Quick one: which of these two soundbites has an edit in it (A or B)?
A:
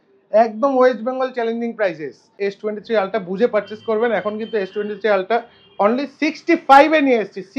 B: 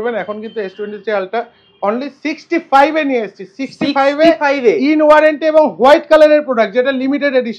A